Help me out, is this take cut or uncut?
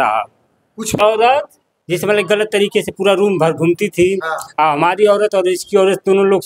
cut